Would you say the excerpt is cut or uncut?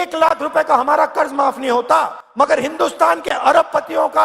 cut